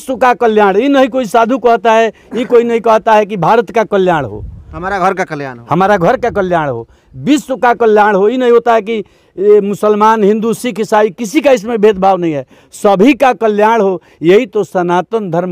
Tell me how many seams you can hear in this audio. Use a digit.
0